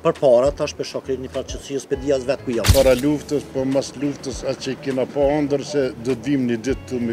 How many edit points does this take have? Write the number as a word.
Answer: one